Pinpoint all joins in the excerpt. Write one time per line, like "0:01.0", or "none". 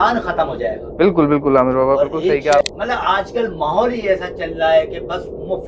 0:02.6